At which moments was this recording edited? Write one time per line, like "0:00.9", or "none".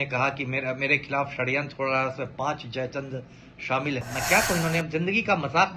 0:04.0